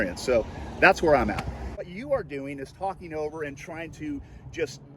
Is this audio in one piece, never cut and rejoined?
no; 1 cut; at 1.8 s

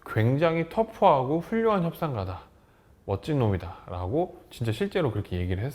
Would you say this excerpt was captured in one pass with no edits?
yes; 0 cuts

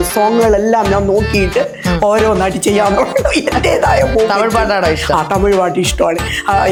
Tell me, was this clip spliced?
no; 0 cuts

